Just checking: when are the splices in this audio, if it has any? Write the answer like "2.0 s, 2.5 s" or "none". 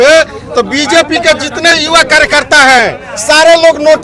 none